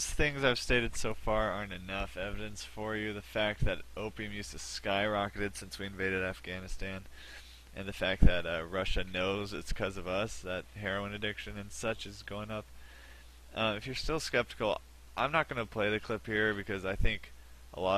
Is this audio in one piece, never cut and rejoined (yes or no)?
no